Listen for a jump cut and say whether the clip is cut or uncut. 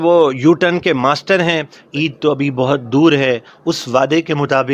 cut